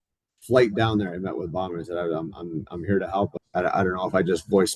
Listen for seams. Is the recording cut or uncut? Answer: cut